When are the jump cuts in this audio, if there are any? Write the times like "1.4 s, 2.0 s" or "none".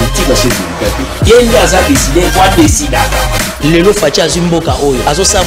none